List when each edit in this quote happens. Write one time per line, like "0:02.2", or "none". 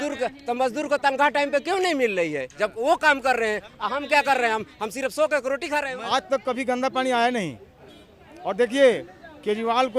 0:05.9